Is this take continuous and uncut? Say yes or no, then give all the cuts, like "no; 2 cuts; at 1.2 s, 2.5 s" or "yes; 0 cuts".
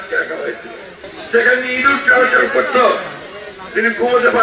no; 1 cut; at 1.1 s